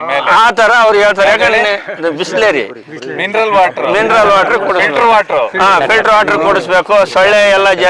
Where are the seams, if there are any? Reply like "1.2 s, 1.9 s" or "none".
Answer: none